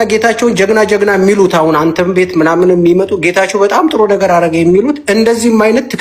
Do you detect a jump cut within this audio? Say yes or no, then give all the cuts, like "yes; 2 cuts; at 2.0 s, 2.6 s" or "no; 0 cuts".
no; 0 cuts